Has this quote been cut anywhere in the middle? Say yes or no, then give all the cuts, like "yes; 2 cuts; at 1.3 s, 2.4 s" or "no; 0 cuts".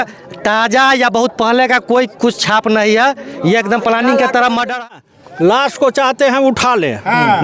yes; 1 cut; at 4.7 s